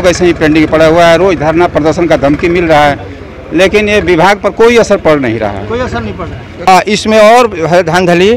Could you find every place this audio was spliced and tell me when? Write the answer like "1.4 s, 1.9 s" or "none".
6.7 s